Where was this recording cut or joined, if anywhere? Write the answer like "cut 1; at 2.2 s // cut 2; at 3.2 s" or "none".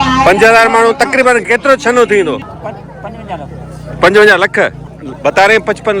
cut 1; at 2.4 s